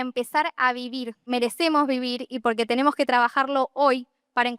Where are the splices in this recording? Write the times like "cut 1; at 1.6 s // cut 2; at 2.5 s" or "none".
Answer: cut 1; at 1.3 s